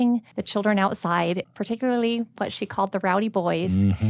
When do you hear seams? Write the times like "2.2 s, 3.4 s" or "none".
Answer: 1.4 s